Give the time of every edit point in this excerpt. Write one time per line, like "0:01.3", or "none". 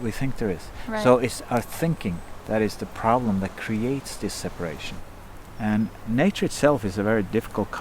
0:04.9